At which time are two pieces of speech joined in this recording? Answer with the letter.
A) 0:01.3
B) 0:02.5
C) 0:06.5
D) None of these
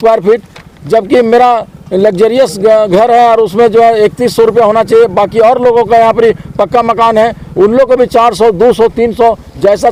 D